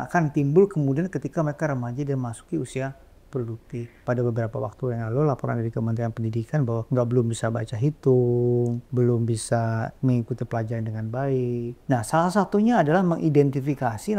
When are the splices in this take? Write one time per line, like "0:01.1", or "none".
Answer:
0:03.9
0:06.8
0:08.8
0:11.8